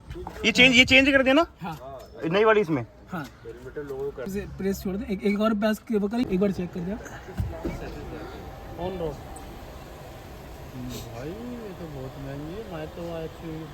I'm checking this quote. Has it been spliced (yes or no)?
yes